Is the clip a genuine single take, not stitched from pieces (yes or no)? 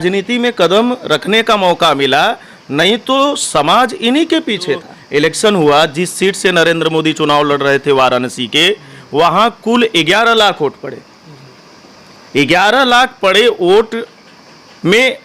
no